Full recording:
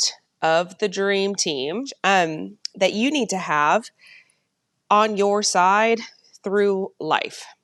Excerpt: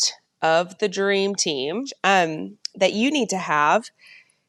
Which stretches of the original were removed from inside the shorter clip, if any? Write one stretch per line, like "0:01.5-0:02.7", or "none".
none